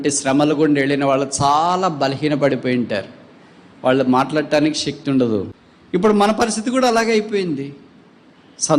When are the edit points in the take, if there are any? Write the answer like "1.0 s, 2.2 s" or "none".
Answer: 5.5 s